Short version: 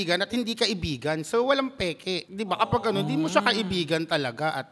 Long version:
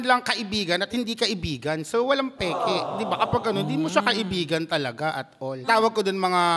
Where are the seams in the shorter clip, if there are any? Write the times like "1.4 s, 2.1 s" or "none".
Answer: none